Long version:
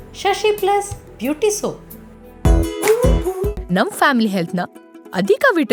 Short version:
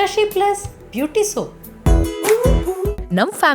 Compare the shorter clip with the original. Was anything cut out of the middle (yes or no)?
yes